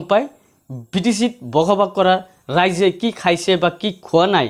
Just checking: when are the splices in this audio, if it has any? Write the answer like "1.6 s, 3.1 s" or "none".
none